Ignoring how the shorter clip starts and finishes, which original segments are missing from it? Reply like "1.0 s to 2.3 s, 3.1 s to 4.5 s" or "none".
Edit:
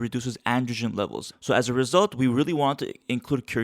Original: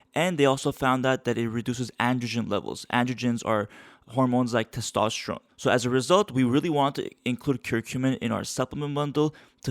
2.8 s to 5.4 s